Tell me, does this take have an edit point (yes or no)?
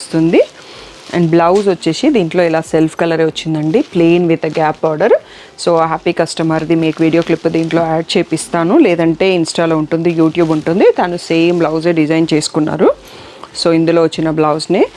no